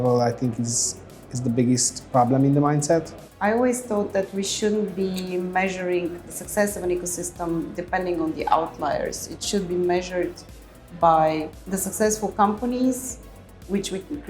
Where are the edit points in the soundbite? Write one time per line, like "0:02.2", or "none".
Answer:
0:03.2
0:11.6